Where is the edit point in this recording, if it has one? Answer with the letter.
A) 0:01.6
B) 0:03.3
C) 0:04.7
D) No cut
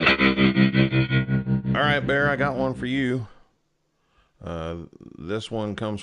A